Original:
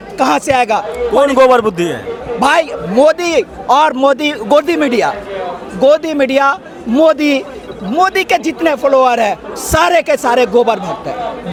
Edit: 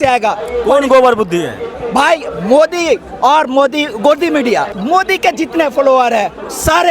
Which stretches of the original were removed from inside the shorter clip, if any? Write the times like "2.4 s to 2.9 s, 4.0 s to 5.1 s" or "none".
5.2 s to 7.8 s